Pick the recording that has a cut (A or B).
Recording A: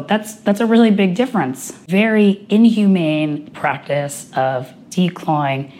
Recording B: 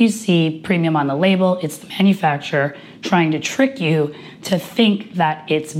A